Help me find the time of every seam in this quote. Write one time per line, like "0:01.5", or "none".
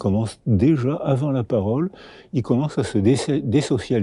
none